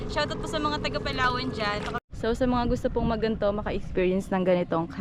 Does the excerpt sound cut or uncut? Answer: cut